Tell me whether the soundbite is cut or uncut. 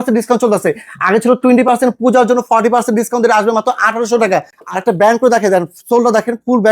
cut